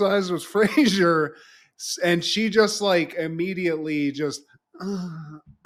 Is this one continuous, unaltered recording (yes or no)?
yes